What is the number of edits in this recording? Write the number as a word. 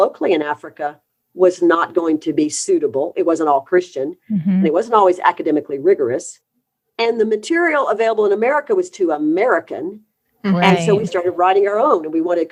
zero